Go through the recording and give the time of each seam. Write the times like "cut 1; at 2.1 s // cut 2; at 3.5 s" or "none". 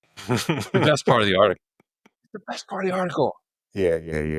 none